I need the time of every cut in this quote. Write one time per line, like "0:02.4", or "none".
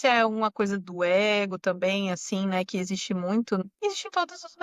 0:03.6